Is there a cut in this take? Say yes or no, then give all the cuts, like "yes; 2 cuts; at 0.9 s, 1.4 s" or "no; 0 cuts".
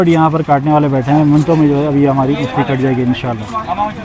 no; 0 cuts